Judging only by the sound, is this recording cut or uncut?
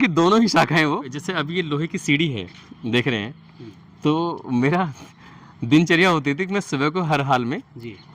cut